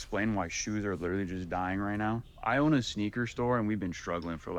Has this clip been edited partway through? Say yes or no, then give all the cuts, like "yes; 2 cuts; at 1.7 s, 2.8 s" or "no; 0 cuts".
yes; 1 cut; at 2.3 s